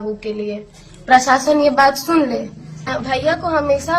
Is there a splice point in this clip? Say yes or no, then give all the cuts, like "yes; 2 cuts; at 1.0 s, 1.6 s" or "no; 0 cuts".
yes; 1 cut; at 2.9 s